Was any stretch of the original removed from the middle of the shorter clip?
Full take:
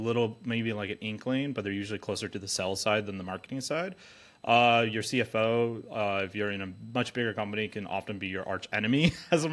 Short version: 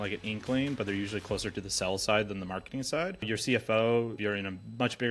yes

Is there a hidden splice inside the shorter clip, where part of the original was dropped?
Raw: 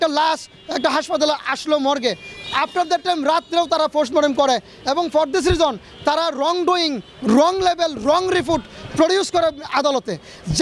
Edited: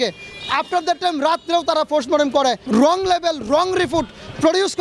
yes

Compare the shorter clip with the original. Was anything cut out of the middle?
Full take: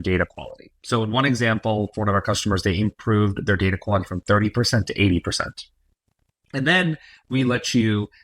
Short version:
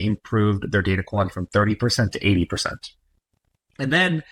no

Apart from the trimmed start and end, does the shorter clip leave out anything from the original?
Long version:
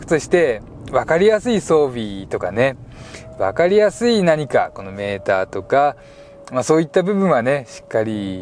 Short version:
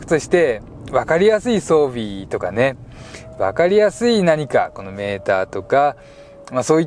no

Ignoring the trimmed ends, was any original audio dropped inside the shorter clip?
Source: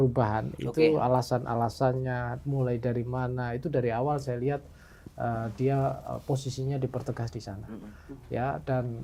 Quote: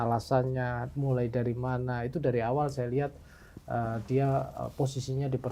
no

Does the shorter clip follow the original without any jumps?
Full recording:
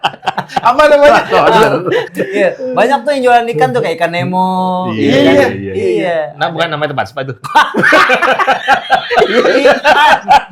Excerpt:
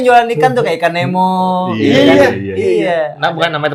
yes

